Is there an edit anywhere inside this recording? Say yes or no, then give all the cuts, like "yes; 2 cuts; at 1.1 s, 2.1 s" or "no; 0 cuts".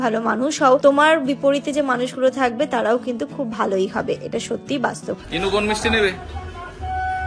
yes; 1 cut; at 5.2 s